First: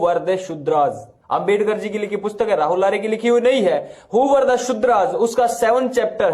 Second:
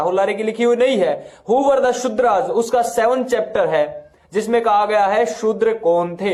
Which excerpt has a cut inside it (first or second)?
first